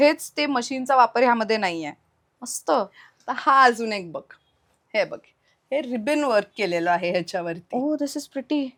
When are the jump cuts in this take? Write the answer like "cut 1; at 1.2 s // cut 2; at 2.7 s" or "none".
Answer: none